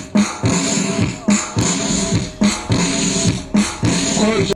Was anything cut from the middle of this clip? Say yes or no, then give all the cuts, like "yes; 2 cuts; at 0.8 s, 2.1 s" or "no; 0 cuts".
no; 0 cuts